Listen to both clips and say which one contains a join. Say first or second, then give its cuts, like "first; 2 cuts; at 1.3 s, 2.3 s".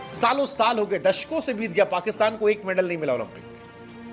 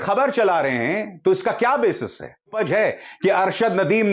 second; 1 cut; at 2.5 s